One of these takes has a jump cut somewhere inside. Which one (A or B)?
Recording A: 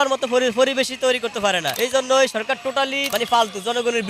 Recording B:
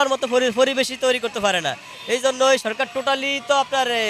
A